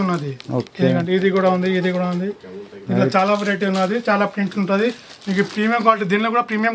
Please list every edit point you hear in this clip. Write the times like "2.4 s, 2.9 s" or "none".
none

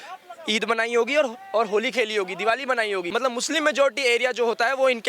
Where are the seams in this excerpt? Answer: 3.1 s

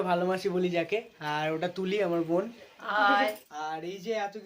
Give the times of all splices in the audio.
3.4 s

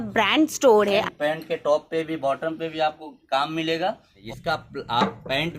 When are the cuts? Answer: 1.0 s, 4.2 s

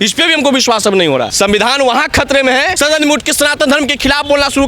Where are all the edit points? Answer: 1.3 s, 2.7 s

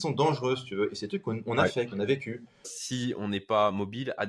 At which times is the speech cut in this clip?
2.8 s

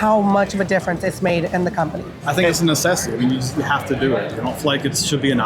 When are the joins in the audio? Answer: 2.2 s, 4.3 s

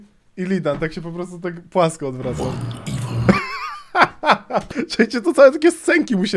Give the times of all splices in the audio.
4.7 s

